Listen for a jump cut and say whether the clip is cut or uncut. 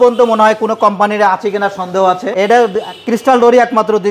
cut